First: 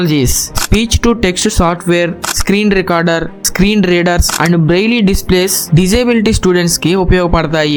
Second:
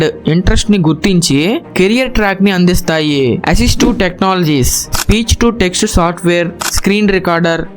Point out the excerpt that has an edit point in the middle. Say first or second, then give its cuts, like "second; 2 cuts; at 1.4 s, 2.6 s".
second; 1 cut; at 3.4 s